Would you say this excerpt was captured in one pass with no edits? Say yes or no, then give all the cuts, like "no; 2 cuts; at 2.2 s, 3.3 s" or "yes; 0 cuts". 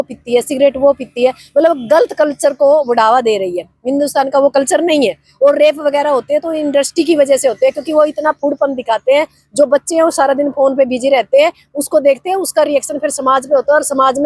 yes; 0 cuts